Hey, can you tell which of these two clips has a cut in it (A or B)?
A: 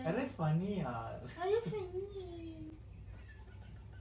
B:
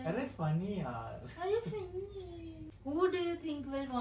B